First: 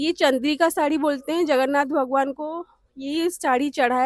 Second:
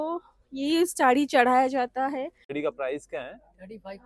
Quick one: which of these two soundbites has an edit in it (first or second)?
second